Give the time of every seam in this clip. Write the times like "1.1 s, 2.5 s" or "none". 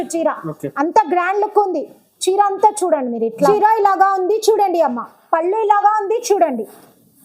3.5 s